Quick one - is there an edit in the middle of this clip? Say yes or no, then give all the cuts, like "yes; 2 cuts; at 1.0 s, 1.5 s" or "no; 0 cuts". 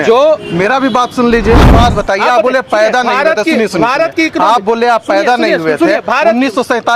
yes; 1 cut; at 1.7 s